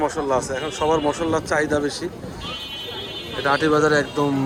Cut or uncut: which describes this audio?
uncut